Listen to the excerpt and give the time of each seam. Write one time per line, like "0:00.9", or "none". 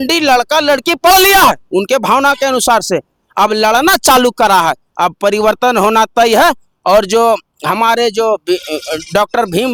none